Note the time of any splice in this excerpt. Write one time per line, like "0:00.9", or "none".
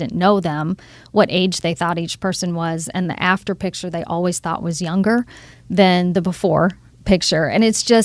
none